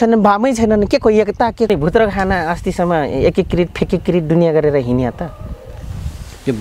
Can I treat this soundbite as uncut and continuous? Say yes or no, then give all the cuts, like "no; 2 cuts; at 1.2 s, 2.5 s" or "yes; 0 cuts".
no; 1 cut; at 1.7 s